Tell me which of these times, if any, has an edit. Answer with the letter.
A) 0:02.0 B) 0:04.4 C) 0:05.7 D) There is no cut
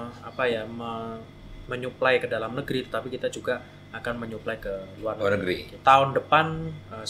C